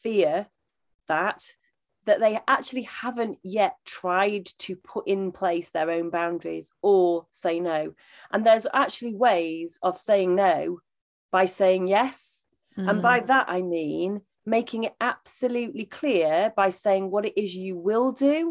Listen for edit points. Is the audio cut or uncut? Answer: uncut